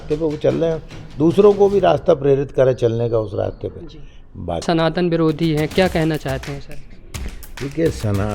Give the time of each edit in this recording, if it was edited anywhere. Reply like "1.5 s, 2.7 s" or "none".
4.6 s